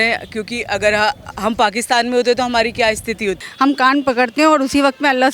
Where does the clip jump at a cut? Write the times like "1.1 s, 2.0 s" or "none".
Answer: 3.4 s